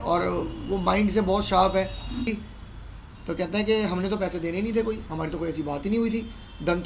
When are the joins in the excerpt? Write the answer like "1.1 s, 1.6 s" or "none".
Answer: 2.3 s